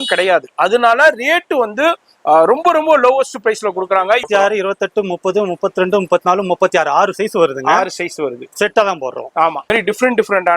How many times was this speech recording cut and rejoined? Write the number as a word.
two